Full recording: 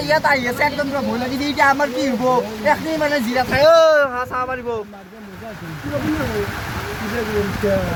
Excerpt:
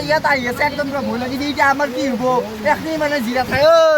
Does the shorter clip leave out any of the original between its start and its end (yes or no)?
no